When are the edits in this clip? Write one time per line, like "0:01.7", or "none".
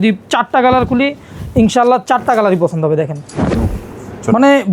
0:03.7